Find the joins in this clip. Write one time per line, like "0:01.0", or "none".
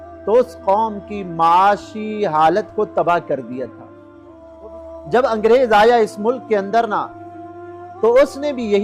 0:04.4